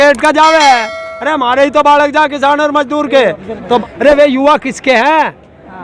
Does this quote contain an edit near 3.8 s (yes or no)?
yes